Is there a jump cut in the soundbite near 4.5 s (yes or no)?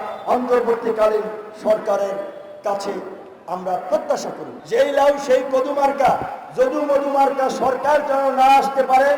yes